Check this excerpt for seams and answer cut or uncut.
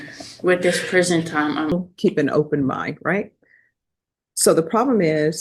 cut